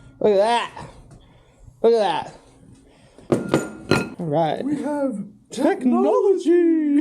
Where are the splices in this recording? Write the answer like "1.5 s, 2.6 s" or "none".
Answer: 4.1 s